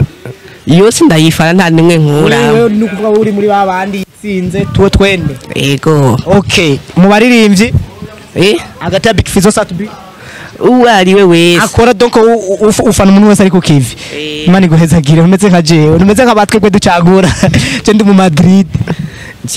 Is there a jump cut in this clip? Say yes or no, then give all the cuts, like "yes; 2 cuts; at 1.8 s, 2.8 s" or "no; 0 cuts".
no; 0 cuts